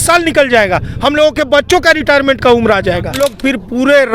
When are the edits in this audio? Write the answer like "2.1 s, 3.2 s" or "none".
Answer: 3.2 s

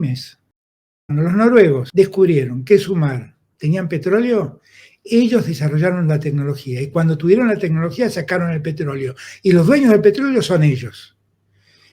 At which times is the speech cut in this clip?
1.0 s, 1.8 s

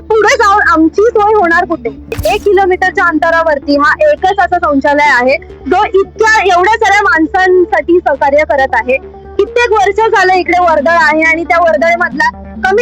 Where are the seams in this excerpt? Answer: 2.2 s

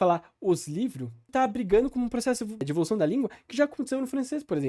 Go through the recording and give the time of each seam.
1.3 s, 2.7 s

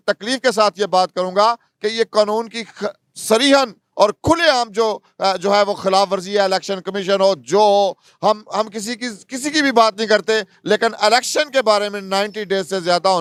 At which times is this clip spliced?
none

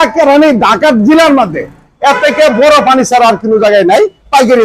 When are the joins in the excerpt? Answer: none

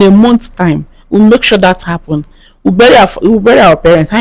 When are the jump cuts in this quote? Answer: none

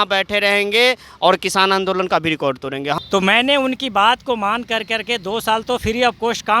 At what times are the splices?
3.0 s

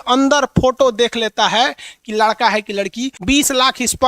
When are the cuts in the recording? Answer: 3.2 s

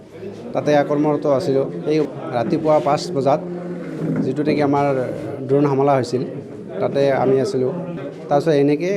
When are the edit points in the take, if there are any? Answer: 2.1 s, 8.0 s

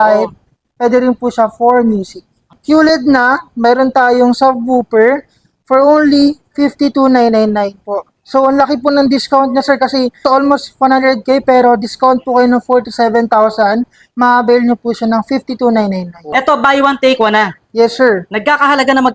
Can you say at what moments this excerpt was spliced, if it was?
2.5 s, 10.2 s, 16.3 s

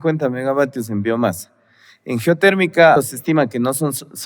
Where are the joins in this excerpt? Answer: 3.0 s

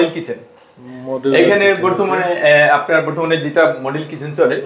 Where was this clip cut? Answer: none

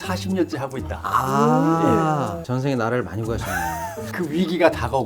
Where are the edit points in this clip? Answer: 4.1 s

